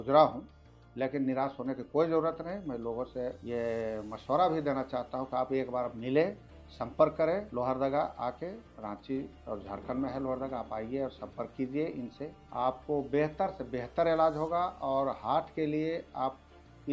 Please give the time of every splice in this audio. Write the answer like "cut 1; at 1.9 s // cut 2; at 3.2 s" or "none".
cut 1; at 3.4 s // cut 2; at 7.5 s // cut 3; at 8.7 s // cut 4; at 9.4 s // cut 5; at 12.4 s